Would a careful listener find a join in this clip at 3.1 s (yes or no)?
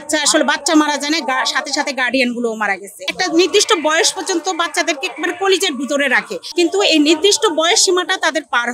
yes